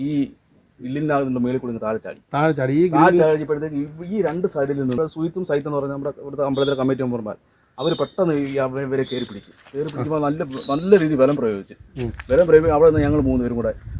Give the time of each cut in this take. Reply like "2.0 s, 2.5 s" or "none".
5.0 s

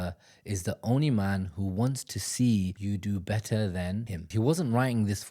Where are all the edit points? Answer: 2.8 s, 4.3 s

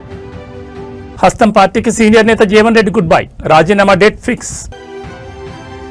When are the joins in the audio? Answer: 0.9 s

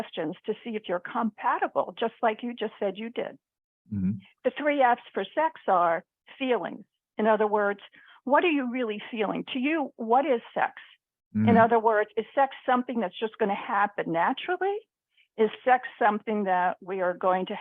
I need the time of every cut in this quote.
3.9 s

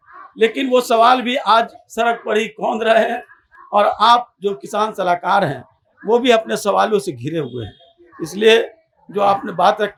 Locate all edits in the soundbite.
none

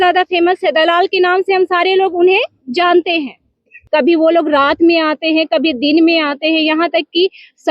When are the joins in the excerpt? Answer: 3.7 s

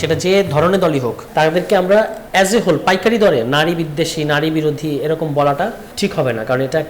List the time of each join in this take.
1.2 s, 2.2 s, 5.8 s

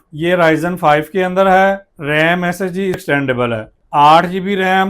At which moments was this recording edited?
3.0 s

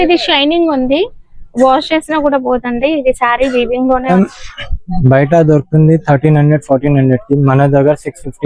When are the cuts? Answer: 4.1 s

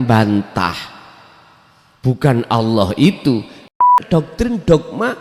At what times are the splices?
3.8 s

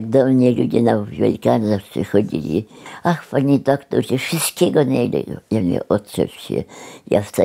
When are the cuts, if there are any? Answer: 2.8 s

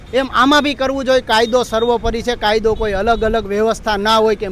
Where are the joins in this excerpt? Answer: none

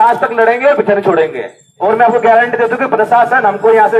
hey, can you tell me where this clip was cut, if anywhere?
1.7 s

